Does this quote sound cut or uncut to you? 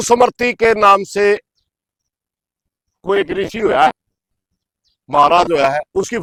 uncut